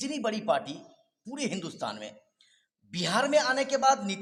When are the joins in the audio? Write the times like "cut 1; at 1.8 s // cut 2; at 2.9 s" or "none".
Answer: none